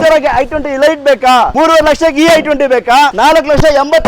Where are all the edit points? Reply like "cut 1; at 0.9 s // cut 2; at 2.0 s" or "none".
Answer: cut 1; at 1.5 s // cut 2; at 3.1 s

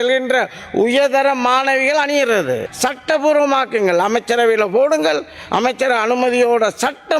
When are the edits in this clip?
cut 1; at 2.7 s

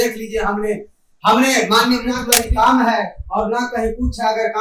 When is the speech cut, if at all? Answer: cut 1; at 2.3 s

